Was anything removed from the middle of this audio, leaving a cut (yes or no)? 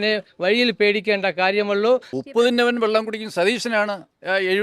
no